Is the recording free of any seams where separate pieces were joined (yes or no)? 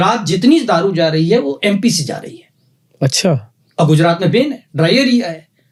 yes